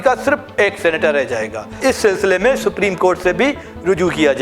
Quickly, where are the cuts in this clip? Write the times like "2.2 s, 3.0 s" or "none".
1.8 s